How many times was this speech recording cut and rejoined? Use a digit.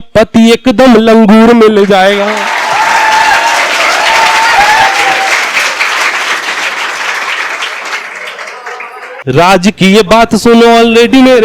1